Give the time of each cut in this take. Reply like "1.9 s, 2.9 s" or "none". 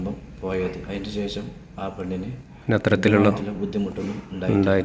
none